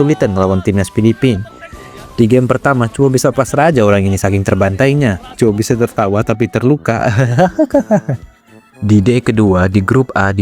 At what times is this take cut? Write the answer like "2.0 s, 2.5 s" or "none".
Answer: 8.8 s